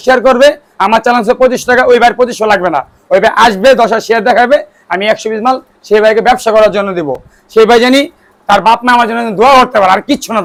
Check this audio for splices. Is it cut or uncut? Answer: uncut